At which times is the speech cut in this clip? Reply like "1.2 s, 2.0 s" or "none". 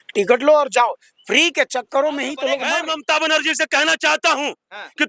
2.6 s